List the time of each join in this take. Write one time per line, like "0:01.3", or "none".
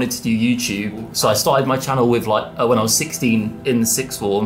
0:01.1